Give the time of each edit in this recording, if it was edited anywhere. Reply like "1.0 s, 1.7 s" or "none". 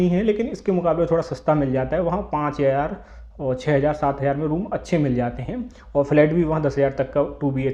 none